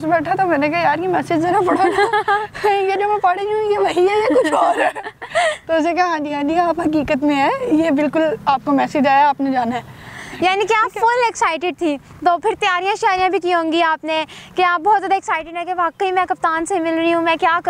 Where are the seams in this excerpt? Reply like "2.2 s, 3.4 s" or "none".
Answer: none